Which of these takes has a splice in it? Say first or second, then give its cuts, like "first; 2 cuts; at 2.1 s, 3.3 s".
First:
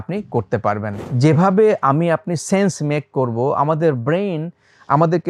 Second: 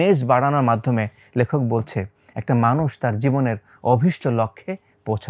first; 1 cut; at 1.1 s